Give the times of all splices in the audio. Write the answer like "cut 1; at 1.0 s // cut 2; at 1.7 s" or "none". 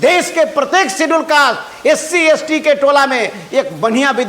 none